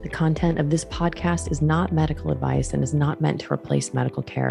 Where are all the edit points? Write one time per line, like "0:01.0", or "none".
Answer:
none